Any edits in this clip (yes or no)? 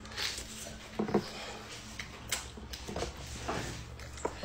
no